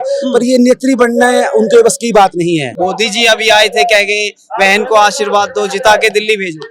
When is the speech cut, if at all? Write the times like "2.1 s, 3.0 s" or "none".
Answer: 2.7 s